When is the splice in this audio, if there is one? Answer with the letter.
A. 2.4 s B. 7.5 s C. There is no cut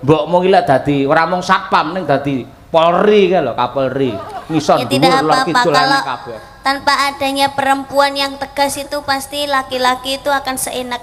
C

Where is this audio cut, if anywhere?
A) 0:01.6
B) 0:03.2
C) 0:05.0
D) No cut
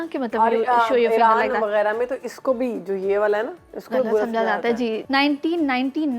C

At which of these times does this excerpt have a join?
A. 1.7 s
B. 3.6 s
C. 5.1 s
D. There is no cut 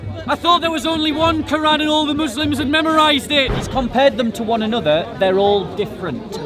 B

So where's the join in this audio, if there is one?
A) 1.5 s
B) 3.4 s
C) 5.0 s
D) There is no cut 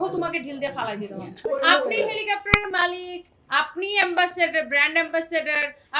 A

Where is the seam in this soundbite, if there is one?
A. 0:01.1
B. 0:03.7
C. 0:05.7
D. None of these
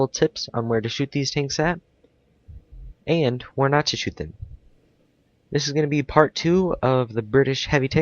B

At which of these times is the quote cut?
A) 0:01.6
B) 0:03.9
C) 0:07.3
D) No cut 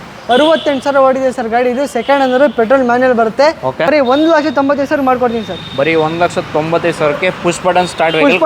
B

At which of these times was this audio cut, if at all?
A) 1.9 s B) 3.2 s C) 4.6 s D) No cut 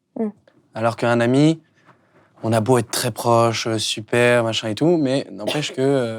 D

